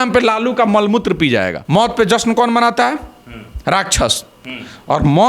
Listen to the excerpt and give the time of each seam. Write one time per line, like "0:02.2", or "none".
0:01.6